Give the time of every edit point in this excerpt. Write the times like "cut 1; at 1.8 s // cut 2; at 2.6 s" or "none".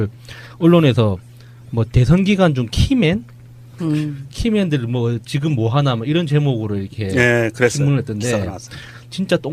cut 1; at 3.1 s